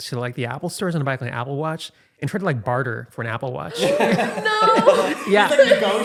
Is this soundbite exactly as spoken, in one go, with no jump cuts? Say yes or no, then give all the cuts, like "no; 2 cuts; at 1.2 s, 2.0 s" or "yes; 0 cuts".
yes; 0 cuts